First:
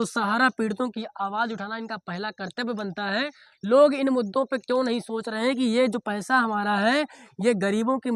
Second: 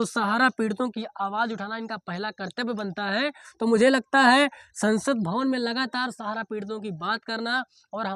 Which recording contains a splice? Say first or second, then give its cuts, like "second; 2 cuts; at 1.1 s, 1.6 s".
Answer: first; 1 cut; at 3.4 s